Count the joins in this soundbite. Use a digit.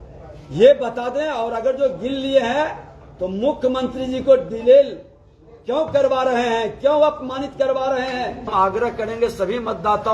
1